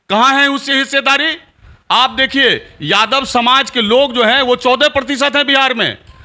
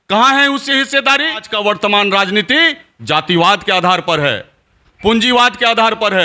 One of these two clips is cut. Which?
second; 1 cut; at 1.5 s

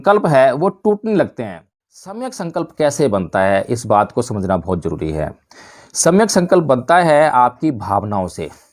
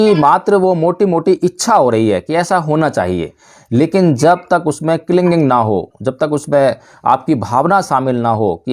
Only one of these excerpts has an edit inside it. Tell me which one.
first; 1 cut; at 2.3 s

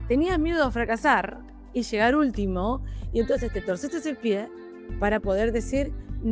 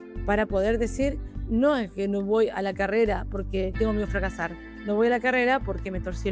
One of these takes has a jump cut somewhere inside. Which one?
second; 1 cut; at 3.7 s

